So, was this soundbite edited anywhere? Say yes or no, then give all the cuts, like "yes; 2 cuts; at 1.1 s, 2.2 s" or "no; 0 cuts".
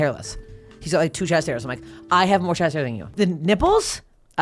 yes; 1 cut; at 3.1 s